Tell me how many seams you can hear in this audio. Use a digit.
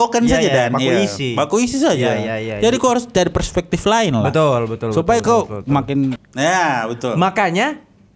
1